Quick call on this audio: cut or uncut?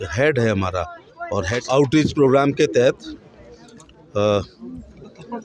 cut